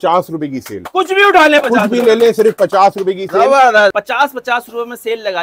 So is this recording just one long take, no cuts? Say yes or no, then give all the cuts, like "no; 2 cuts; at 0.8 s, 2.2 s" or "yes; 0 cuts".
no; 1 cut; at 3.9 s